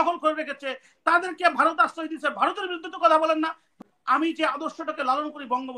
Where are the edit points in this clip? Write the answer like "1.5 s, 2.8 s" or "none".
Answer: 3.7 s